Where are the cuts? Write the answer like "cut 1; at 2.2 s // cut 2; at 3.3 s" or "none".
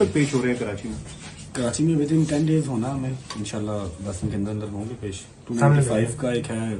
none